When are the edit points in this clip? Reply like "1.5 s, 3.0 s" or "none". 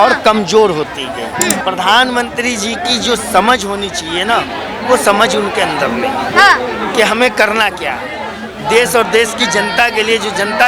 1.6 s